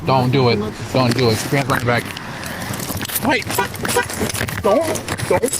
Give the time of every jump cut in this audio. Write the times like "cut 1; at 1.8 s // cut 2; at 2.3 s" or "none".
cut 1; at 3.9 s